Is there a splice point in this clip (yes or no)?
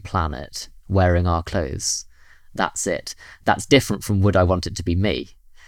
yes